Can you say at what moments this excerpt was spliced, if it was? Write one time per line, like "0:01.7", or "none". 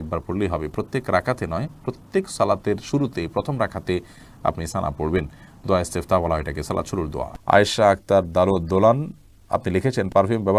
none